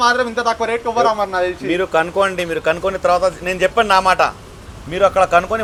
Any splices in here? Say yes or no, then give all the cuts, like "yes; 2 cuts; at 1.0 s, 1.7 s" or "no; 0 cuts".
no; 0 cuts